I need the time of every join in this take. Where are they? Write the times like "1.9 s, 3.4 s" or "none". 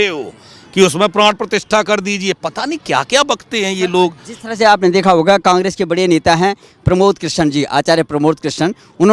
none